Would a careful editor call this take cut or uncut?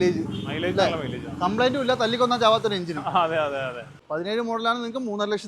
cut